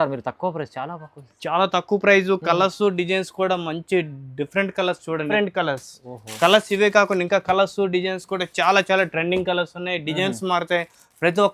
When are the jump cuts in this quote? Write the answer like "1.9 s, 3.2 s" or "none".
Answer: 5.3 s